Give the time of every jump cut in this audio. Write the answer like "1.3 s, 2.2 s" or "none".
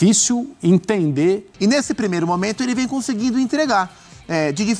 1.5 s